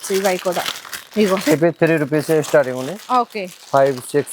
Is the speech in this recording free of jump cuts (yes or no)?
yes